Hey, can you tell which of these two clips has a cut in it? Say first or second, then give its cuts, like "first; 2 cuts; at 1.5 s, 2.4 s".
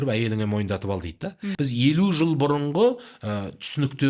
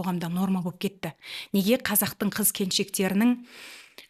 first; 1 cut; at 1.4 s